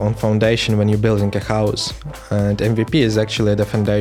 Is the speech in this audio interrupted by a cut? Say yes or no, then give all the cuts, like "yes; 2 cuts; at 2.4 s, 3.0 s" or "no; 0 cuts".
no; 0 cuts